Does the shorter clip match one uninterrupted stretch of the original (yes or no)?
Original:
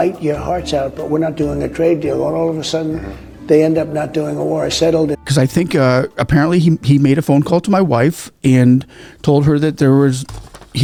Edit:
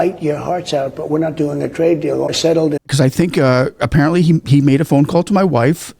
no